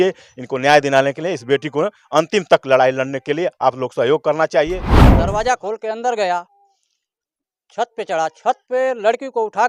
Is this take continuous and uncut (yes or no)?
no